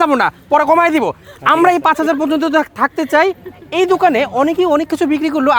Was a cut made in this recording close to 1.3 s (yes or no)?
no